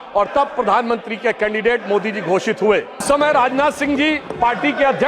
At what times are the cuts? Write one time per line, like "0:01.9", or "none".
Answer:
0:03.0